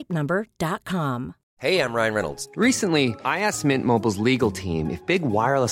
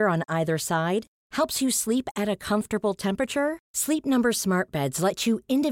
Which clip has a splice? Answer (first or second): first